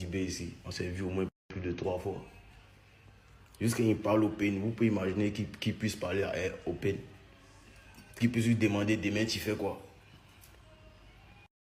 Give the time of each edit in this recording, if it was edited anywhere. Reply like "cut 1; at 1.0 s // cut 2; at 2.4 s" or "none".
none